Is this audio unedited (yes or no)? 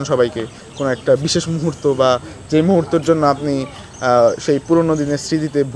yes